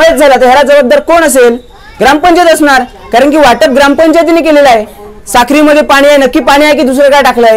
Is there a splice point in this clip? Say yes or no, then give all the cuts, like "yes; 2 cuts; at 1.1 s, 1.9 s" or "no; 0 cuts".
no; 0 cuts